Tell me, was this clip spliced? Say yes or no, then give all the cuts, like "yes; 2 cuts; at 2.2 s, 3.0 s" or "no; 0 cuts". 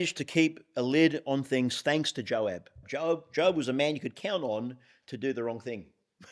yes; 1 cut; at 2.8 s